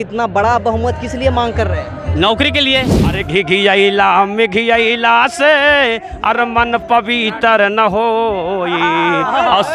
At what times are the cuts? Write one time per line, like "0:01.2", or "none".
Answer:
0:03.2